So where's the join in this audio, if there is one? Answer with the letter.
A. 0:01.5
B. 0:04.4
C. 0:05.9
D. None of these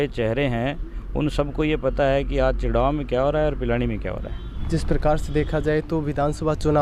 D